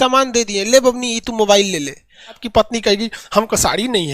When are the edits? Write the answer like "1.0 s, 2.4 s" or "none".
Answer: 2.4 s